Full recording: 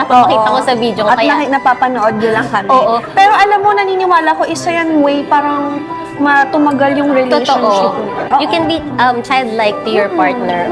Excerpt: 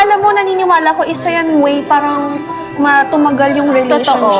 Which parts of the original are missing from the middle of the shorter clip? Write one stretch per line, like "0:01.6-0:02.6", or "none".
none

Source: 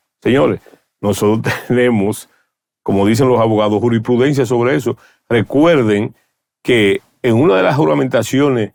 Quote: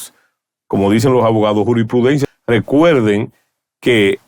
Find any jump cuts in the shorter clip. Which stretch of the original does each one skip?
0:04.4-0:05.1

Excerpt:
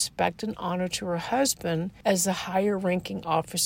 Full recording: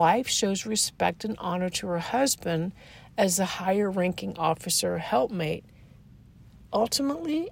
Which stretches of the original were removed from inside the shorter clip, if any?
0:02.7-0:03.0

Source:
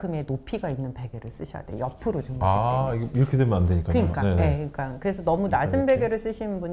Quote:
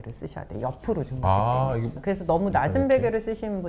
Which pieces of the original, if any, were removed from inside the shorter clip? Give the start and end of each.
0:03.1-0:04.9

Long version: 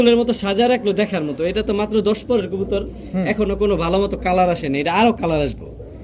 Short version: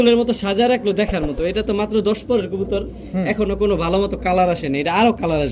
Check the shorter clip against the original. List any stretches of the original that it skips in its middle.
none

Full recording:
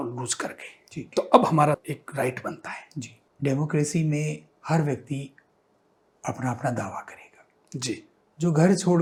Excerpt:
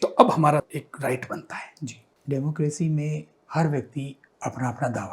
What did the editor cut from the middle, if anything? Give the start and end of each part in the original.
0:05.4-0:06.0

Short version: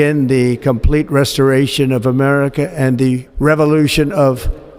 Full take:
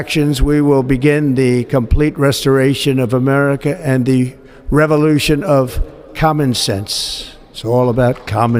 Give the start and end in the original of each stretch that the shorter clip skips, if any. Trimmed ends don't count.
0:04.3-0:04.6

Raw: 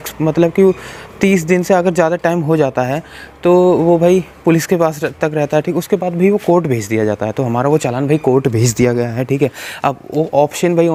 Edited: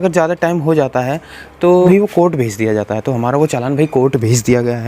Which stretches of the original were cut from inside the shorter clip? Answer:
0:03.7-0:06.2

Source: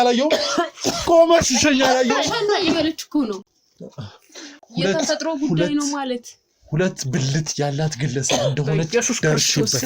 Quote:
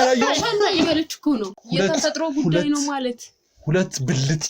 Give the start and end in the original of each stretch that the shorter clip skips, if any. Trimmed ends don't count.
0:03.5-0:04.6

